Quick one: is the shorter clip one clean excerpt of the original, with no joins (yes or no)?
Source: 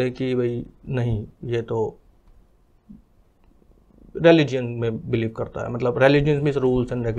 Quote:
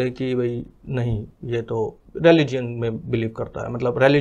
no